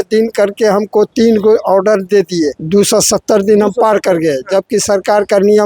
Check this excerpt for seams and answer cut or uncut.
cut